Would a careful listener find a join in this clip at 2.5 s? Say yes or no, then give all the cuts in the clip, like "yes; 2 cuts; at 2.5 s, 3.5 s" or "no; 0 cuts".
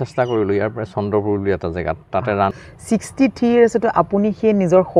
yes; 1 cut; at 2.5 s